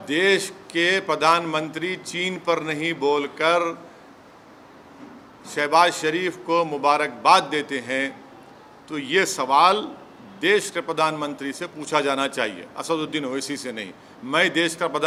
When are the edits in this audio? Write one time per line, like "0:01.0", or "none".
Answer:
none